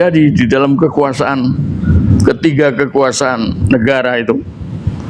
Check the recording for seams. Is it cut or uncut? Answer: uncut